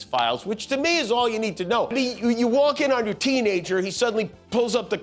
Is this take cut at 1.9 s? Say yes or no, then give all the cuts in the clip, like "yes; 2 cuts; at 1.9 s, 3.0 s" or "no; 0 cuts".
yes; 1 cut; at 1.9 s